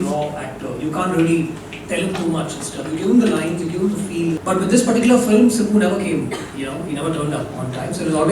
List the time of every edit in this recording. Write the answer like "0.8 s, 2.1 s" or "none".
4.4 s